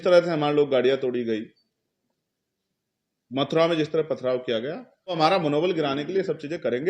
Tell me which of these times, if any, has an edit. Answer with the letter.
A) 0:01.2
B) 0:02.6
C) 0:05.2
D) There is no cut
C